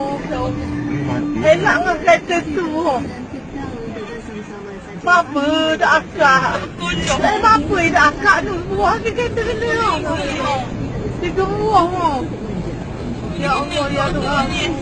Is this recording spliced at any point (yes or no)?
no